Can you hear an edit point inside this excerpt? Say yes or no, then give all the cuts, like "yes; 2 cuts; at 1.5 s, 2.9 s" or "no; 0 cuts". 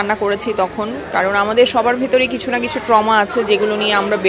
no; 0 cuts